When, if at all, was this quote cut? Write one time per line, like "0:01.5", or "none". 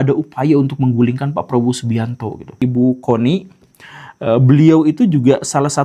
0:02.5